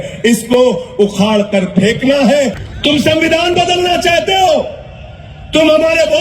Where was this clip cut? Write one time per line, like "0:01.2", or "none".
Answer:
0:02.7